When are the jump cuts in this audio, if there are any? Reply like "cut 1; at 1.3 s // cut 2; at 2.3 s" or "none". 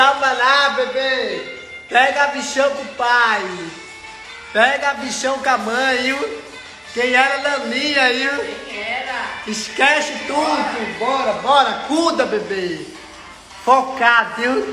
none